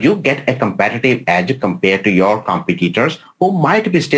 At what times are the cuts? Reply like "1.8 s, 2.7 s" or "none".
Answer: none